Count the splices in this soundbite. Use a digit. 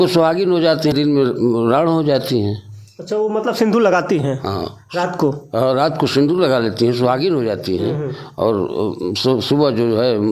1